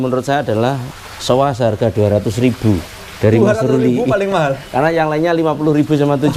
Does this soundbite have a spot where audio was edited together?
no; 0 cuts

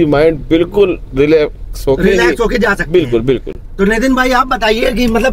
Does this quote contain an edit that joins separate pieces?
no; 0 cuts

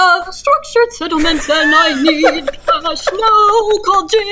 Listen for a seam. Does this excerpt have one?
no; 0 cuts

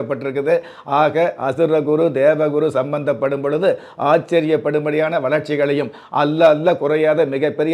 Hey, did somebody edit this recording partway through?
no; 0 cuts

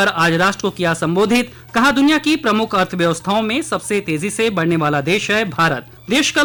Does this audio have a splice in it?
no; 0 cuts

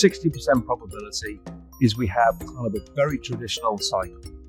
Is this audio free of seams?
yes; 0 cuts

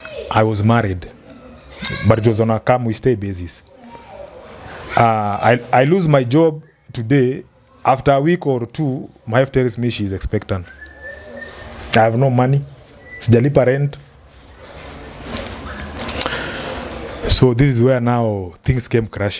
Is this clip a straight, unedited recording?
yes; 0 cuts

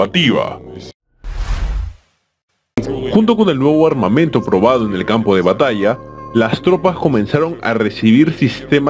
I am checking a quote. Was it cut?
yes; 1 cut; at 2.7 s

